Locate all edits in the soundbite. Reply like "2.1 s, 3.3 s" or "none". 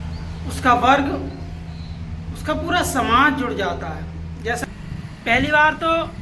4.6 s